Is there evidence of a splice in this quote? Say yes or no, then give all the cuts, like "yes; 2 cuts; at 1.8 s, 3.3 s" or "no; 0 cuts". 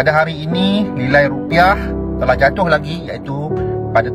no; 0 cuts